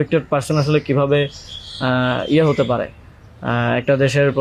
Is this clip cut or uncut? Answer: uncut